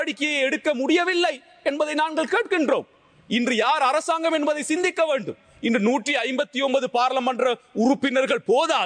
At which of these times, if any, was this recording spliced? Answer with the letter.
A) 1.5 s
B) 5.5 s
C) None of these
C